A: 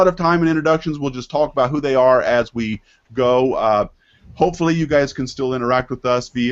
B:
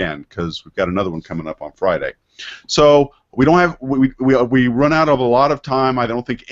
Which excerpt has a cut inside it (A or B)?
A